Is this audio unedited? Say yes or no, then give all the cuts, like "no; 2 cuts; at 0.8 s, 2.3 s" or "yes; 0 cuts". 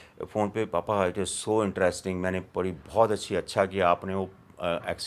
yes; 0 cuts